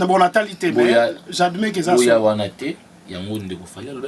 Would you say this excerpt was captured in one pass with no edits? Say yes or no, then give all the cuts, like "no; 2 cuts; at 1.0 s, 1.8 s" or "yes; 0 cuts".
yes; 0 cuts